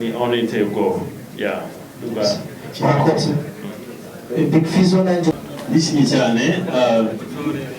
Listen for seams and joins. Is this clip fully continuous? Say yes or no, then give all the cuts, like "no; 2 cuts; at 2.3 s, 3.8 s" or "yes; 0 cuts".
no; 1 cut; at 5.5 s